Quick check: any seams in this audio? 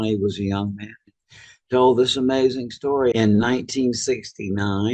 yes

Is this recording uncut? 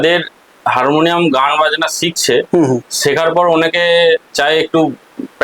yes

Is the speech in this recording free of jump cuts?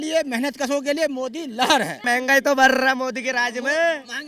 no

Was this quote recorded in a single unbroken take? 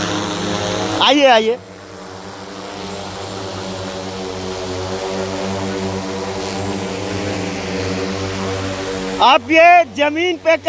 yes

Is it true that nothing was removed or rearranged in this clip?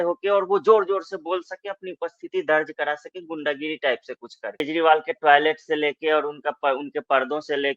no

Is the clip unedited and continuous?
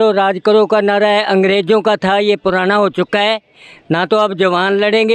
yes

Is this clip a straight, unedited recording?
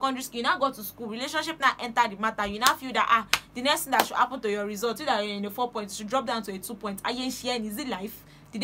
yes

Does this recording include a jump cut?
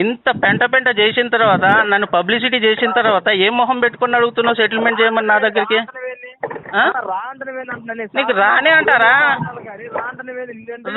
no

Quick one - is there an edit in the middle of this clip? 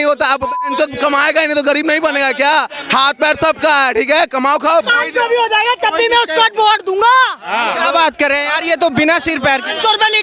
yes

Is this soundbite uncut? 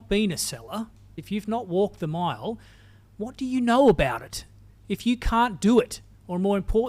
no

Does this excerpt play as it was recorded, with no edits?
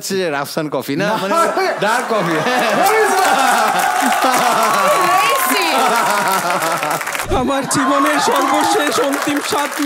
no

